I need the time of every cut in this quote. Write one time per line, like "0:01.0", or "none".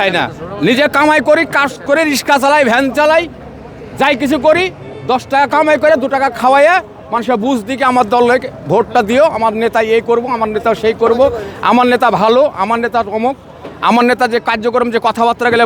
none